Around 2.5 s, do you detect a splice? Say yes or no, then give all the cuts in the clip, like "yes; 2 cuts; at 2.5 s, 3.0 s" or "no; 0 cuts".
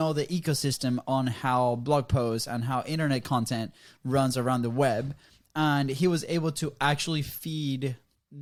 no; 0 cuts